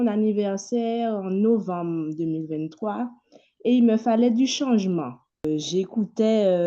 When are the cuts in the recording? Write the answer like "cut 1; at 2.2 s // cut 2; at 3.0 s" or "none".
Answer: cut 1; at 5.4 s